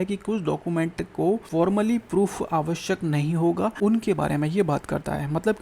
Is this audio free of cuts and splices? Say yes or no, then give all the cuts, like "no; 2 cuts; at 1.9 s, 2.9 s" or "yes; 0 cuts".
no; 2 cuts; at 1.5 s, 3.7 s